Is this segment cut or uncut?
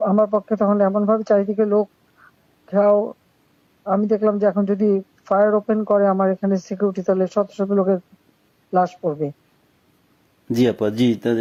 uncut